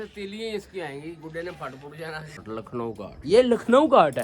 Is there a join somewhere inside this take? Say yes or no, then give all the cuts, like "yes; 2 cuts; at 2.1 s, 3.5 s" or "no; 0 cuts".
yes; 1 cut; at 2.5 s